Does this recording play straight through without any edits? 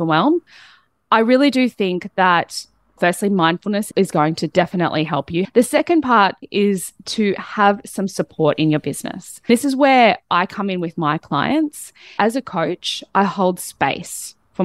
no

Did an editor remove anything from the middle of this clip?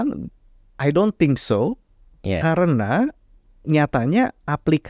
no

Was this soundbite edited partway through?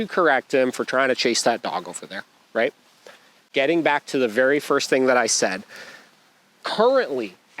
yes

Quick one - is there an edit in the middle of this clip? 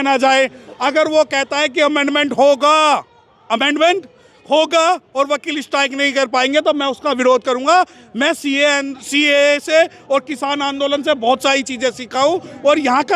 no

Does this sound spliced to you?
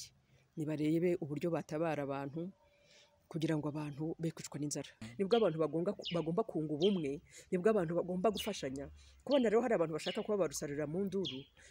yes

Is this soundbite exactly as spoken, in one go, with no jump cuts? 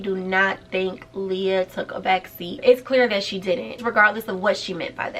yes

